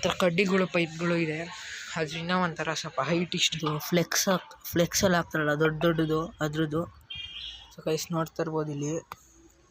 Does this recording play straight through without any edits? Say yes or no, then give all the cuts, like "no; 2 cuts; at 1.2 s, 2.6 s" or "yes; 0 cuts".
no; 2 cuts; at 3.5 s, 7.8 s